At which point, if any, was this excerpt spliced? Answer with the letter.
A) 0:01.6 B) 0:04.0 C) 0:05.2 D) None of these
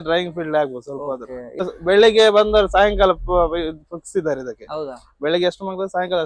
A